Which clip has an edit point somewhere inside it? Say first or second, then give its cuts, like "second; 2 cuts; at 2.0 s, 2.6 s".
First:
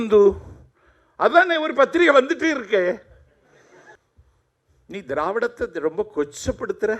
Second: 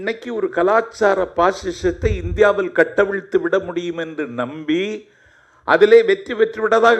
first; 1 cut; at 4.0 s